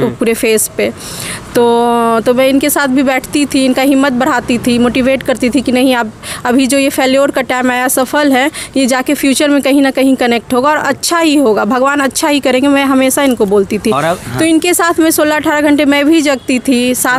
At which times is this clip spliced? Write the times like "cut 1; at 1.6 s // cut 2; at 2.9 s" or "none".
none